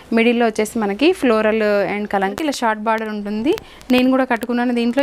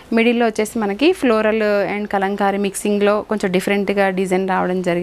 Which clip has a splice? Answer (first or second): first